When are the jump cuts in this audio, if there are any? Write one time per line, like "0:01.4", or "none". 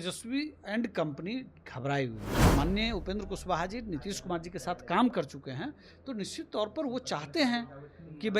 0:02.3